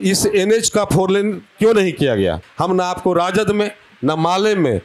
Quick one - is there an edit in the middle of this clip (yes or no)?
yes